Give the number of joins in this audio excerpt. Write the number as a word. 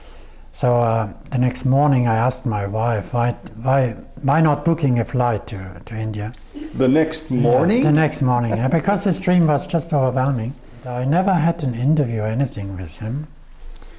one